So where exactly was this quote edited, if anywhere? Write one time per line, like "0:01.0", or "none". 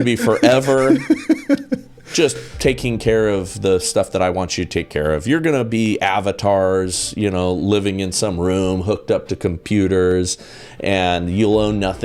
none